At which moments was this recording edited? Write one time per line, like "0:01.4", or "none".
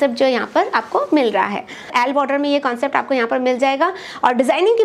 0:01.9